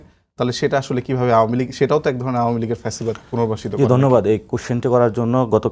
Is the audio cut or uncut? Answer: uncut